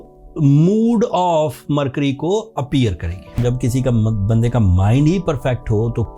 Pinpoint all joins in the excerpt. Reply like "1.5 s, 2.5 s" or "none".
3.4 s